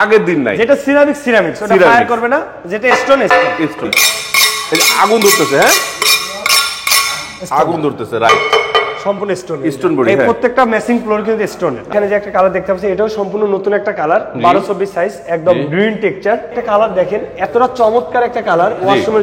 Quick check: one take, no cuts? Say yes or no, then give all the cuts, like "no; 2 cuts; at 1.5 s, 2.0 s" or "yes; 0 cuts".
no; 3 cuts; at 3.9 s, 11.9 s, 16.6 s